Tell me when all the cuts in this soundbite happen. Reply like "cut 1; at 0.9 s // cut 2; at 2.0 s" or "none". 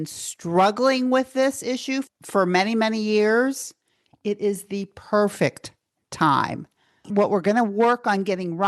cut 1; at 2.1 s // cut 2; at 7.1 s

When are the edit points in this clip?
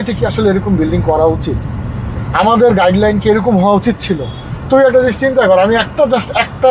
none

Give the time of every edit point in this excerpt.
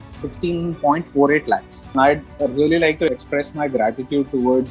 cut 1; at 1.9 s // cut 2; at 3.1 s

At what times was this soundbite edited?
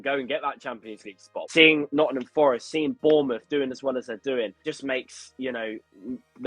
cut 1; at 1.3 s // cut 2; at 4.6 s

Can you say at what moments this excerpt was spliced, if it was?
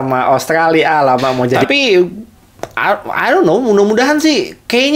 cut 1; at 1.6 s

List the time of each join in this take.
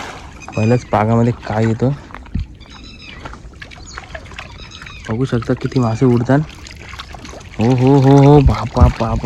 none

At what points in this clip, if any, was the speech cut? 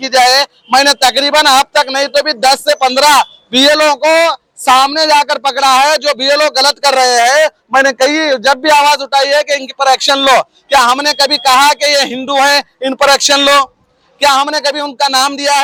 none

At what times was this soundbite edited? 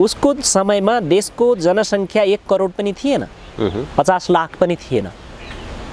none

